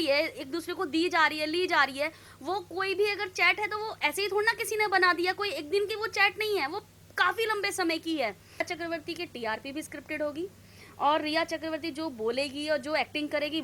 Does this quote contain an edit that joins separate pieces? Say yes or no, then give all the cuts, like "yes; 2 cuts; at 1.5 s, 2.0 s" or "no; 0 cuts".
yes; 1 cut; at 8.6 s